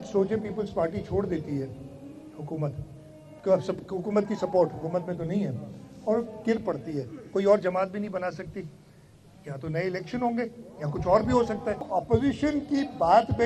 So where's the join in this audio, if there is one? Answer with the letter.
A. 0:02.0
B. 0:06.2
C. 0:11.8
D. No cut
C